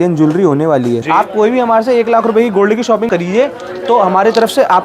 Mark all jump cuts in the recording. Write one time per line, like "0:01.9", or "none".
0:01.0
0:03.1